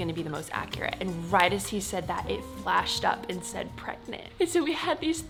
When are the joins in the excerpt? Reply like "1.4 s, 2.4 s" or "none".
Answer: none

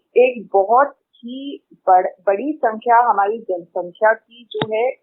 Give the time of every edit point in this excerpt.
none

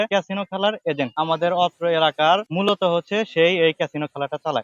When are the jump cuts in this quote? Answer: 1.1 s

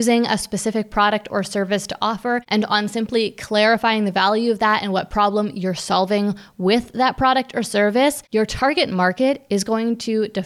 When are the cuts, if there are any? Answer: 2.4 s, 8.2 s

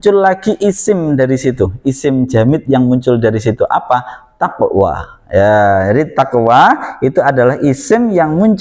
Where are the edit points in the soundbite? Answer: none

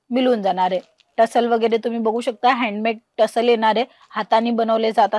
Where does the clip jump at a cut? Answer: none

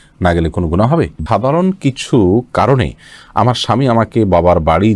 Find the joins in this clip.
1.2 s

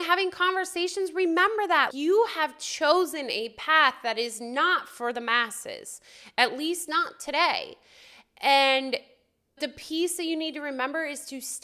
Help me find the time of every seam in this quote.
9.6 s

